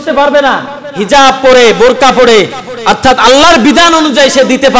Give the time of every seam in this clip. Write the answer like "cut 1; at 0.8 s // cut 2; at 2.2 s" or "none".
none